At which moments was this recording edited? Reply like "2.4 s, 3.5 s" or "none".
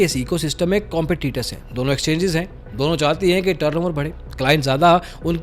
none